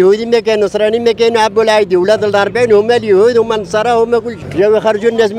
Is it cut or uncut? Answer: cut